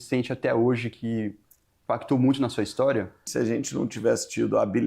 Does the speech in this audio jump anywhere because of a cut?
yes; 1 cut; at 3.2 s

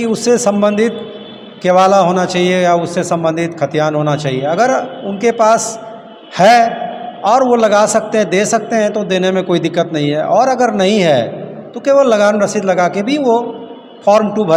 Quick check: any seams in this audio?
no; 0 cuts

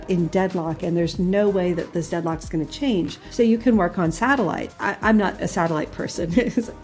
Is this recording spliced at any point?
yes; 2 cuts; at 3.2 s, 4.7 s

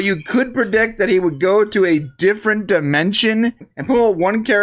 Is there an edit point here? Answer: yes; 1 cut; at 3.7 s

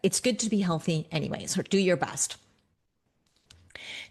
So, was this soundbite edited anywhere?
no; 0 cuts

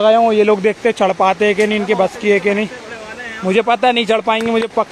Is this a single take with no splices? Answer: yes; 0 cuts

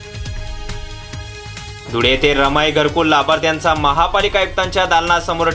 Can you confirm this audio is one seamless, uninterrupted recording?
yes; 0 cuts

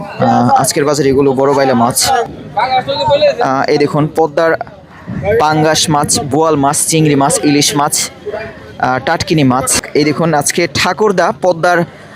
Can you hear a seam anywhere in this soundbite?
yes; 2 cuts; at 2.3 s, 9.8 s

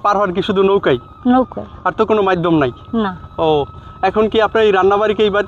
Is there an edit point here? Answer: no; 0 cuts

